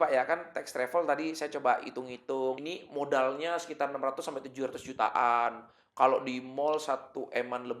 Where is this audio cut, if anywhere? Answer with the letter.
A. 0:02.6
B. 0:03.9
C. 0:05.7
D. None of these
A